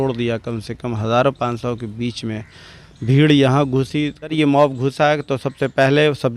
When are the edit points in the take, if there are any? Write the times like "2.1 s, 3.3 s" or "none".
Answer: 4.3 s